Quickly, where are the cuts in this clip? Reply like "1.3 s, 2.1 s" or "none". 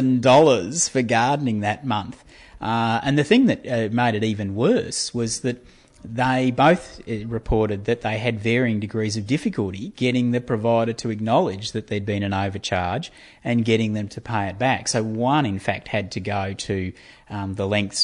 none